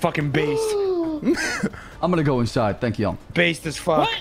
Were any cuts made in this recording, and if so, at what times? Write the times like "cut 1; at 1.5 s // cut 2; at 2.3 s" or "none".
cut 1; at 1.8 s